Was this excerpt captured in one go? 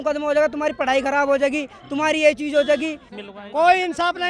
no; 1 cut; at 3.1 s

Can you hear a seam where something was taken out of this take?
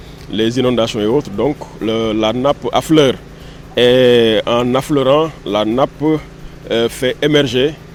no; 0 cuts

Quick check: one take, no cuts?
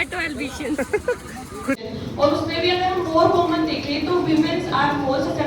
no; 1 cut; at 1.8 s

